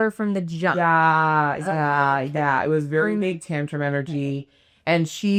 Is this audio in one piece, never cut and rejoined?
yes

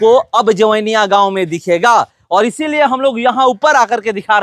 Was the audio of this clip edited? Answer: no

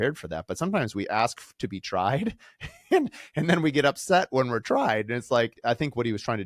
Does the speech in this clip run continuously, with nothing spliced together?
no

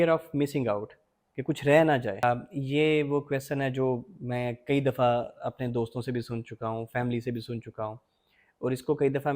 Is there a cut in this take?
yes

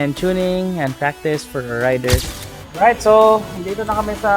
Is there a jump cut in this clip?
yes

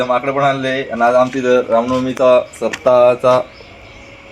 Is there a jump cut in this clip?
no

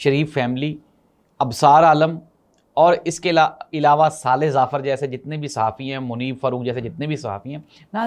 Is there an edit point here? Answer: no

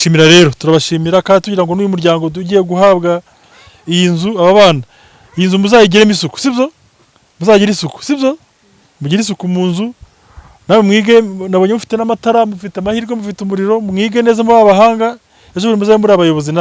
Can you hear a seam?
no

